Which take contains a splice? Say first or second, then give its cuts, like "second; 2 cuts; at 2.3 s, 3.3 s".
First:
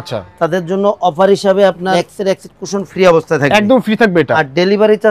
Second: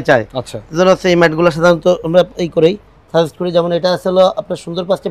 first; 2 cuts; at 2.0 s, 4.3 s